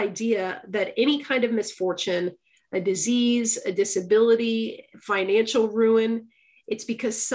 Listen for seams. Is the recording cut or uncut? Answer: uncut